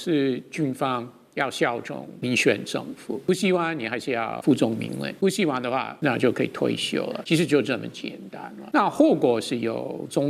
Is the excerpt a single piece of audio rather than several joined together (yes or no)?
no